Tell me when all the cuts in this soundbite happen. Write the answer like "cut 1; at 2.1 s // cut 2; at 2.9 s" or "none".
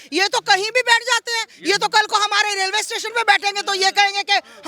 none